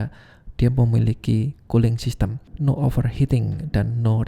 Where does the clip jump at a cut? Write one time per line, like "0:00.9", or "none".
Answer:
0:02.5